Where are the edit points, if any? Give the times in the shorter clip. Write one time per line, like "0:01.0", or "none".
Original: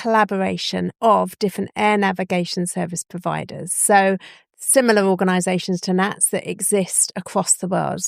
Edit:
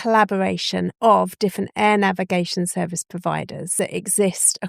0:03.7